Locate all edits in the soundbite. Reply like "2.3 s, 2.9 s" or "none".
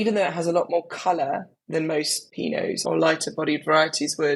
2.2 s